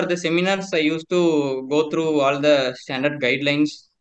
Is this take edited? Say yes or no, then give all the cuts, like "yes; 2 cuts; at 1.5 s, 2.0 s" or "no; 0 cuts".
no; 0 cuts